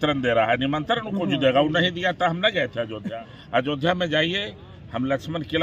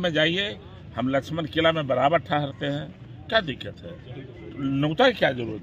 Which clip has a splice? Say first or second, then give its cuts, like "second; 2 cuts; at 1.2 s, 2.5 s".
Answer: first; 1 cut; at 3.1 s